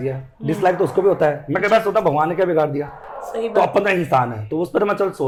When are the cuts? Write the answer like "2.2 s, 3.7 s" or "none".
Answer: none